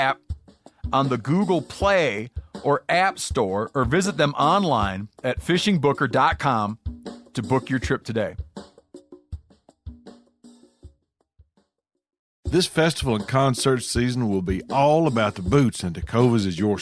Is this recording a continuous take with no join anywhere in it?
no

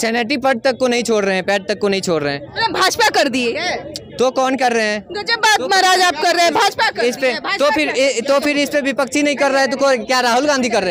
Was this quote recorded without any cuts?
yes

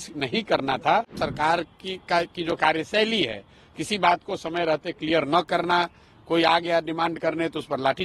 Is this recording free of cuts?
no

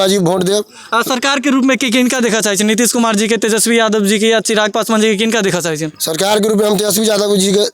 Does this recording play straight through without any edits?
yes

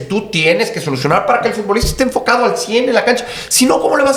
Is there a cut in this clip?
no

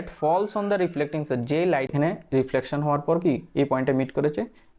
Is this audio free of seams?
no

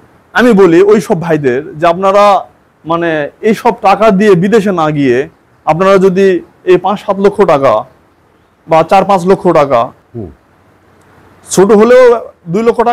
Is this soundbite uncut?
no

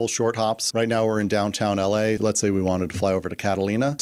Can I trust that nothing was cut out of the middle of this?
yes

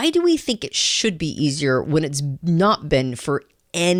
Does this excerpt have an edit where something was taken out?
no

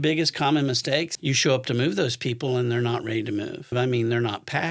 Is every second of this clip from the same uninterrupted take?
no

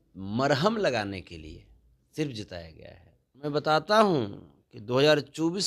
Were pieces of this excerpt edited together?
yes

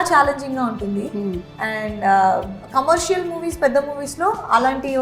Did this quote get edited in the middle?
no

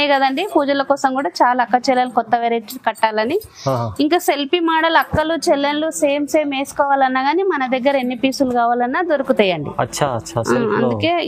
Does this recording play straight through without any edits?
yes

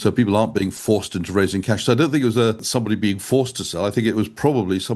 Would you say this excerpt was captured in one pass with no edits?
no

